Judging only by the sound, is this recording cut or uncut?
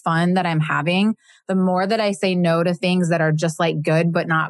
uncut